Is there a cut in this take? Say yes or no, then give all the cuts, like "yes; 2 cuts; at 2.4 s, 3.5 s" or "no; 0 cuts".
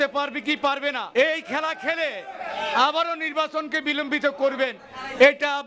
yes; 1 cut; at 1.1 s